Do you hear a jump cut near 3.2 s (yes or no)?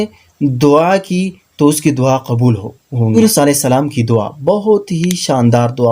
yes